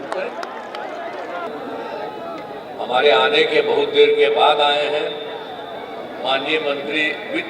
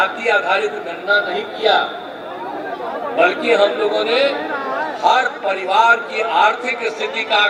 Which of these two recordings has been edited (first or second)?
first